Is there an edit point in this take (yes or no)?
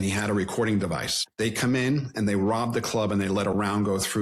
yes